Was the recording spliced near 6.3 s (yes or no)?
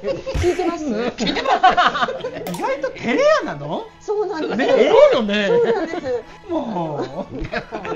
yes